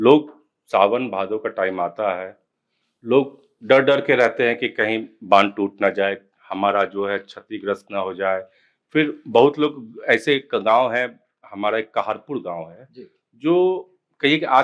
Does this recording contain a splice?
no; 0 cuts

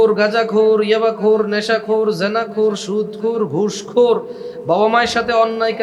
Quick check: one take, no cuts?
yes; 0 cuts

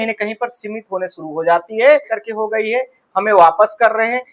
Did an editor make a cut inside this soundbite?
yes; 1 cut; at 2.1 s

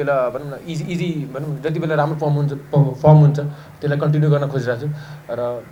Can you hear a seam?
no; 0 cuts

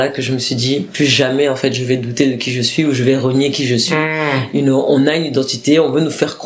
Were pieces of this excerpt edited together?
no; 0 cuts

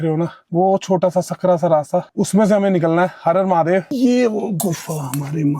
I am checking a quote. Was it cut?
yes; 1 cut; at 3.9 s

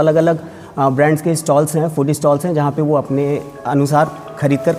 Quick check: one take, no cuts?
yes; 0 cuts

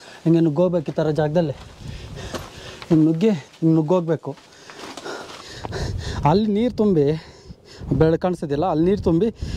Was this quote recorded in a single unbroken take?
no; 2 cuts; at 3.5 s, 5.2 s

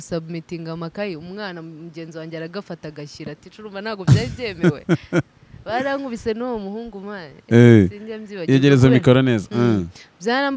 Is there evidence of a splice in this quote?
no; 0 cuts

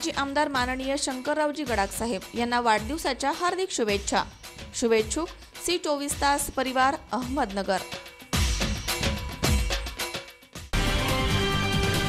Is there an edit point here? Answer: yes; 1 cut; at 10.7 s

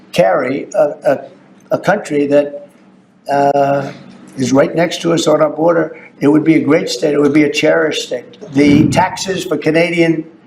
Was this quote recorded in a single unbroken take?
no; 1 cut; at 8.4 s

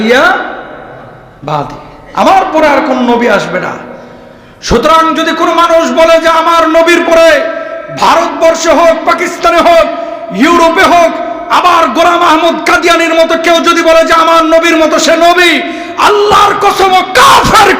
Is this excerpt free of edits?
yes; 0 cuts

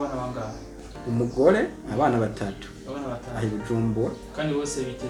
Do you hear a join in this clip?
no; 0 cuts

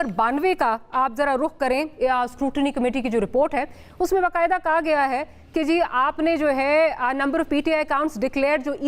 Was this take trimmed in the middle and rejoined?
no; 0 cuts

